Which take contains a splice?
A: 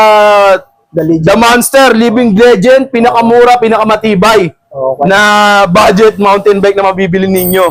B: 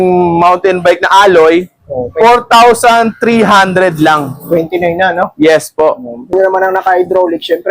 B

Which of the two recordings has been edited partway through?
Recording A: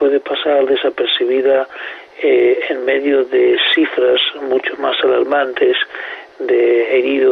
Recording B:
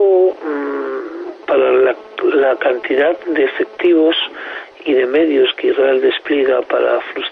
A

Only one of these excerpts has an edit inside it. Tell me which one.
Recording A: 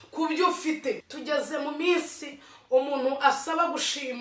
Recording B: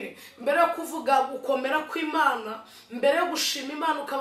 A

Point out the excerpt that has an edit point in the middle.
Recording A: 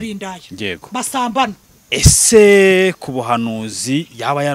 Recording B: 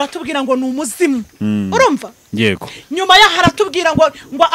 A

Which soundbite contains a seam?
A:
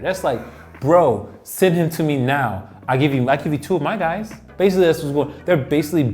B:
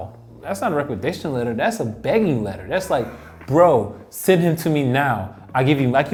A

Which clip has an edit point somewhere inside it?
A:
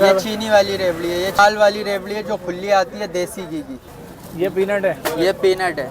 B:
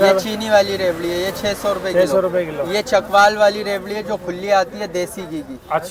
A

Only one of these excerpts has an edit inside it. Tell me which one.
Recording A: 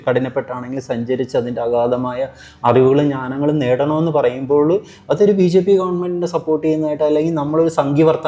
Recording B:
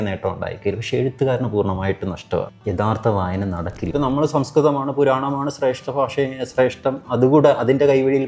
B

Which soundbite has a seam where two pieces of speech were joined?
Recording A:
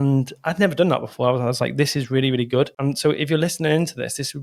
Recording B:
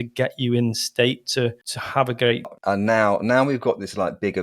B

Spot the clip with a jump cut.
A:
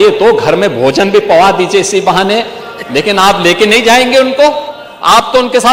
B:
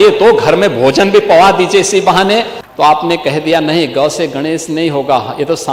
B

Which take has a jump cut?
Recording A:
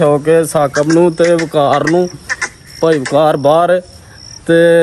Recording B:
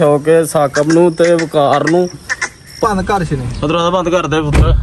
B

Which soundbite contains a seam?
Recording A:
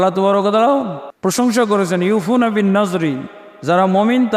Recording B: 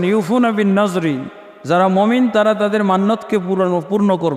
A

